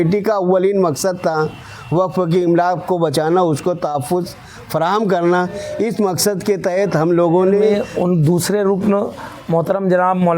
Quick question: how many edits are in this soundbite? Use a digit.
1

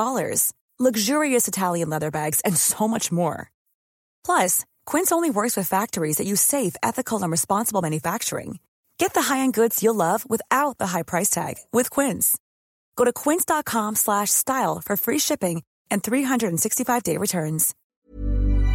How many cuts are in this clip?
1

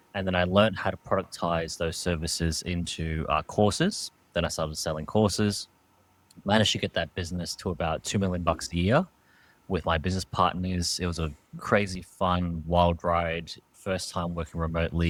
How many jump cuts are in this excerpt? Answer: 0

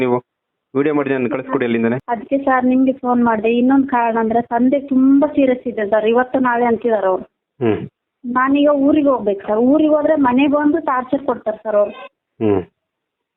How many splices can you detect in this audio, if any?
1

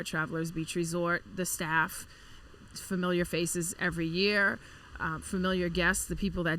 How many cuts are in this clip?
0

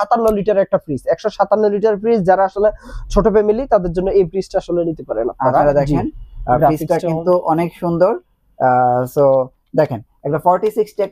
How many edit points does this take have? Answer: 1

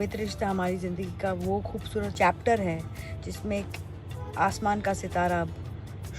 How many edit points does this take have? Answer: 1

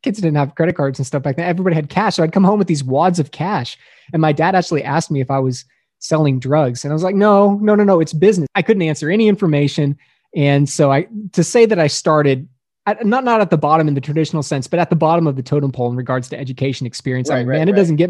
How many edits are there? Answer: 1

